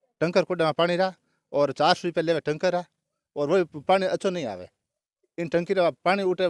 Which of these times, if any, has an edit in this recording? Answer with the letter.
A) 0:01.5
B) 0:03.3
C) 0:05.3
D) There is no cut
D